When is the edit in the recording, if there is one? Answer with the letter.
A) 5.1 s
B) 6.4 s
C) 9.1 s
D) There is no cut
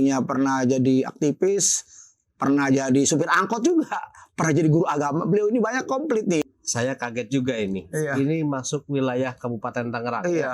B